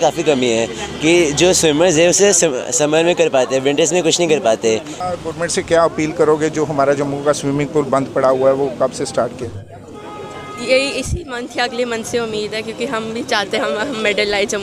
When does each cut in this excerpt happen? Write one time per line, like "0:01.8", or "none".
0:05.0